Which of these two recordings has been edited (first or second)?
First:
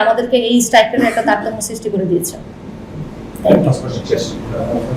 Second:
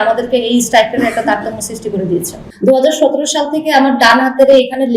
second